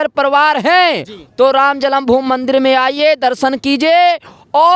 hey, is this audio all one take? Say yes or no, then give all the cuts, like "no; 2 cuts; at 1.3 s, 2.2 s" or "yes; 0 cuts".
yes; 0 cuts